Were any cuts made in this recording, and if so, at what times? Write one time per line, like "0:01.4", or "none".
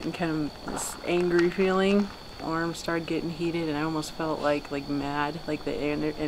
0:02.4